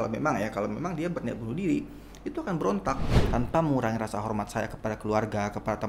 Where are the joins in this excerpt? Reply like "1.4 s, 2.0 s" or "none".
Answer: 3.2 s